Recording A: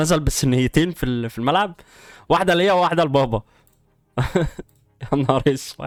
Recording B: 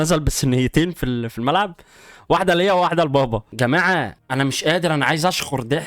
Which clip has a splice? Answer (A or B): B